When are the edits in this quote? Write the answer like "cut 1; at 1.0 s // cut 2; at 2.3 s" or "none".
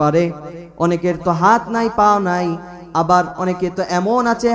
none